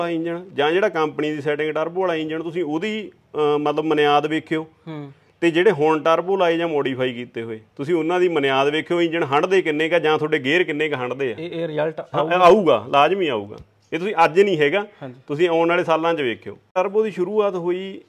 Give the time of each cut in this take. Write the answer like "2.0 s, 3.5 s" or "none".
16.7 s